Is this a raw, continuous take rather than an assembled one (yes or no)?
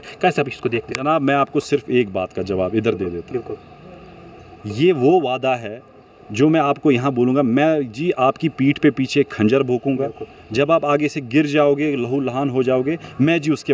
yes